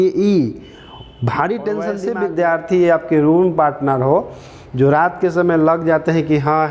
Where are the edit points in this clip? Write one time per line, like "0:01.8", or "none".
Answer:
0:02.1